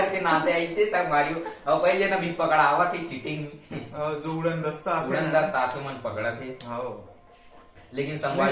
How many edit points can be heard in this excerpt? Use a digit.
0